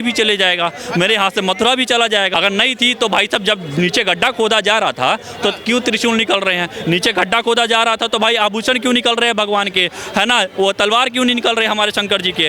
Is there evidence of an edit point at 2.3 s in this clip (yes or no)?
yes